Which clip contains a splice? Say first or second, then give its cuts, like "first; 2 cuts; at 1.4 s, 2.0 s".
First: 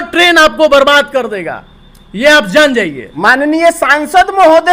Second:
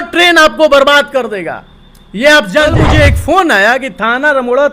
second; 1 cut; at 2.7 s